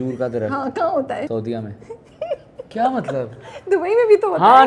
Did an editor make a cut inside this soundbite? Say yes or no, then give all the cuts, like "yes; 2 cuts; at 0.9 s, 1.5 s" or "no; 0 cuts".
yes; 2 cuts; at 1.3 s, 2.7 s